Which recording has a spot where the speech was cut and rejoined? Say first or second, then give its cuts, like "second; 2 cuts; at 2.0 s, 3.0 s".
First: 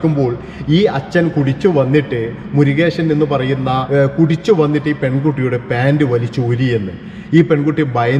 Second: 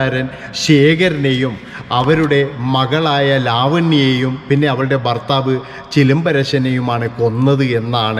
first; 1 cut; at 3.8 s